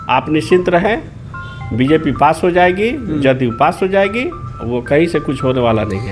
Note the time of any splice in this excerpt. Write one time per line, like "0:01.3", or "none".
none